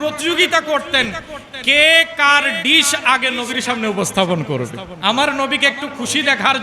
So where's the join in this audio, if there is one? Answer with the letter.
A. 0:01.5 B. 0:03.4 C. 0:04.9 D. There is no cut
C